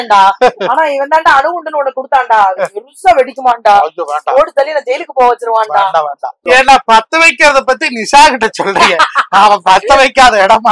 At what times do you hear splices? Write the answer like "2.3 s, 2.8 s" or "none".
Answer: 6.4 s